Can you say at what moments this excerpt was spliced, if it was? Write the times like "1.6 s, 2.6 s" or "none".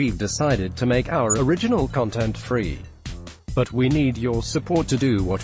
none